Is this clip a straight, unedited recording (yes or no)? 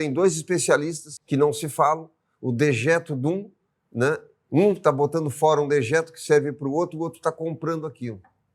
no